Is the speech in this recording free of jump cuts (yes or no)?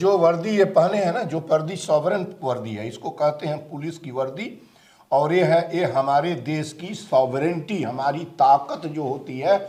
yes